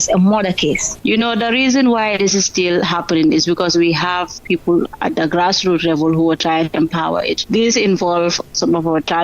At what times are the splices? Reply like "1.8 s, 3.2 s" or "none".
0.9 s, 4.9 s, 7.4 s